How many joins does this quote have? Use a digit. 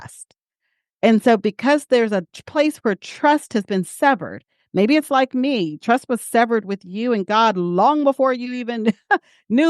0